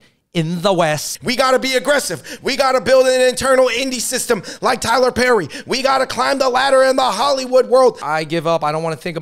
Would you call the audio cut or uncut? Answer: cut